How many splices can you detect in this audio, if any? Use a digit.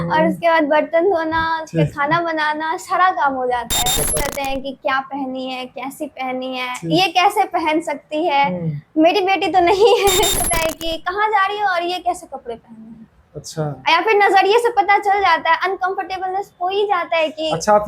2